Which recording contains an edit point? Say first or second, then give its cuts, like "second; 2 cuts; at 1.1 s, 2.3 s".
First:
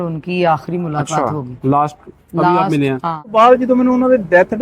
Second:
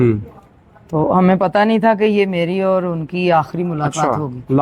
first; 1 cut; at 3.3 s